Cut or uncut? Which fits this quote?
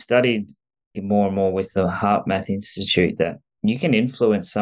cut